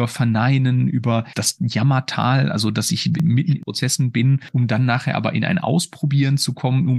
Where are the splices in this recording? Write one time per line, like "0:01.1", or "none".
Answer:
0:01.3
0:03.2